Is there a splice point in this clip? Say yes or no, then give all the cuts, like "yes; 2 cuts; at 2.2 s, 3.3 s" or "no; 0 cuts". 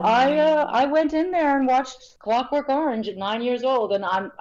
no; 0 cuts